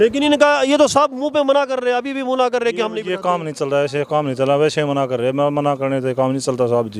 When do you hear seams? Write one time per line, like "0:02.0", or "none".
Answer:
none